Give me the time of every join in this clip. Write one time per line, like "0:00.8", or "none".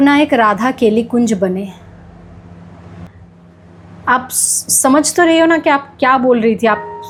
none